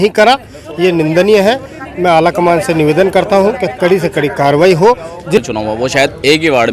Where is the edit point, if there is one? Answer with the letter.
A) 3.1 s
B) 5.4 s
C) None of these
B